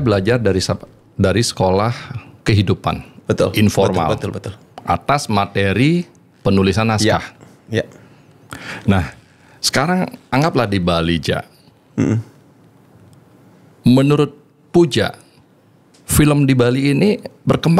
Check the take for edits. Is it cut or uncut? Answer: uncut